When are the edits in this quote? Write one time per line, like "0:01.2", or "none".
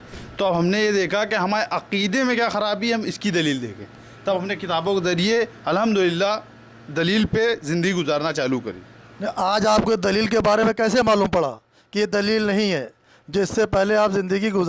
none